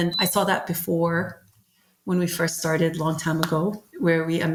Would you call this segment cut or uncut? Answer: uncut